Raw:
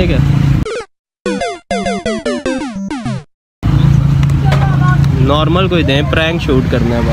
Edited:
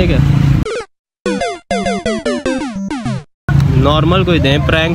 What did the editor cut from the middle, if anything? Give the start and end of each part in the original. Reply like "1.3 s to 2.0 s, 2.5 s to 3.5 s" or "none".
3.5 s to 4.9 s